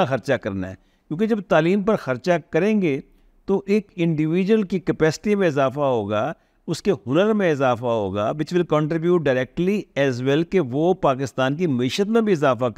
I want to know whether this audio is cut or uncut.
uncut